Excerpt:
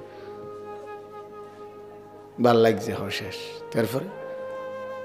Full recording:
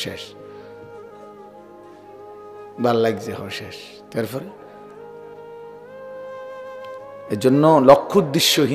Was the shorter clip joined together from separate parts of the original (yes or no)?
yes